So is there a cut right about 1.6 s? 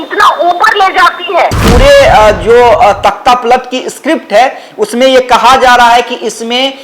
yes; 1 cut; at 1.6 s

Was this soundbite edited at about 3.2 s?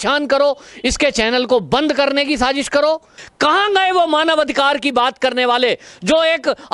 yes; 1 cut; at 3.2 s

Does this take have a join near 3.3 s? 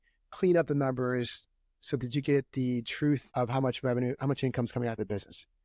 yes; 1 cut; at 3.3 s

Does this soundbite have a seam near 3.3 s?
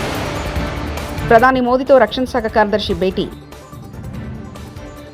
no; 1 cut; at 1.2 s

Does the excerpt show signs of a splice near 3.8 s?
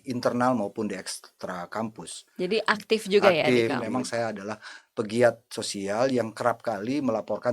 yes; 1 cut; at 3.8 s

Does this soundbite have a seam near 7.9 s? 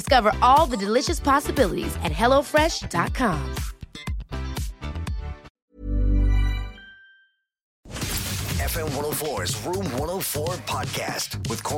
yes; 2 cuts; at 5.6 s, 7.9 s

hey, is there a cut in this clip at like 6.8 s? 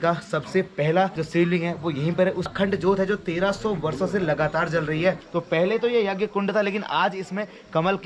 no; 3 cuts; at 1.2 s, 2.4 s, 5.2 s

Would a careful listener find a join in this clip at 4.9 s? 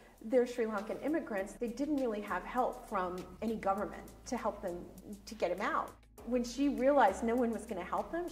yes; 4 cuts; at 1.5 s, 3.3 s, 4.9 s, 6.1 s

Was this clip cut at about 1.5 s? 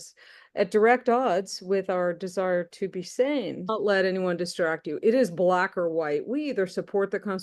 no; 1 cut; at 3.7 s

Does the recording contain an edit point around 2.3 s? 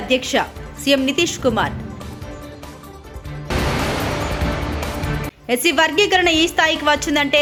no; 0 cuts

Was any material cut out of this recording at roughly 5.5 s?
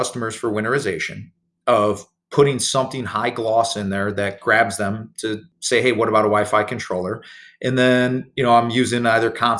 yes; 1 cut; at 5.5 s

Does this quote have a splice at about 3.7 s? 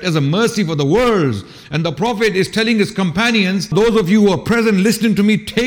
yes; 1 cut; at 3.7 s

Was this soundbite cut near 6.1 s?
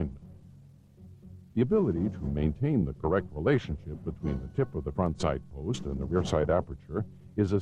no; 1 cut; at 4.2 s

